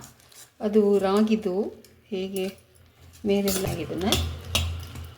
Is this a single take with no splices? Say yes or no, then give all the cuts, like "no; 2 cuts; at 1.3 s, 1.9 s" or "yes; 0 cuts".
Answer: no; 1 cut; at 3.7 s